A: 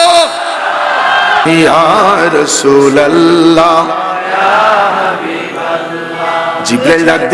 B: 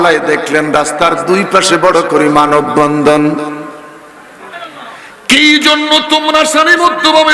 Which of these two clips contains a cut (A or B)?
A